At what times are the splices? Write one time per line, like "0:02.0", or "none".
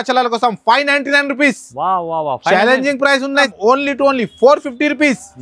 0:03.5